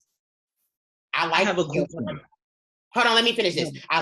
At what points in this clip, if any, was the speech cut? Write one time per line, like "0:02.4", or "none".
0:01.0